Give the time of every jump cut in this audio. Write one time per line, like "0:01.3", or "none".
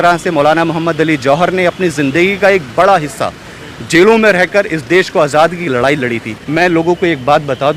0:06.3